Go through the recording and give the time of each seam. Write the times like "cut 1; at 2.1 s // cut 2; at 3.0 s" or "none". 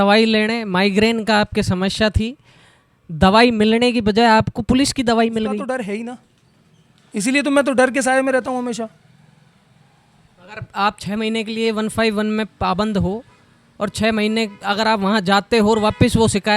cut 1; at 5.7 s